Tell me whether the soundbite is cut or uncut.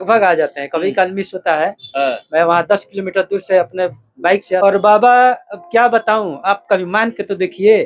cut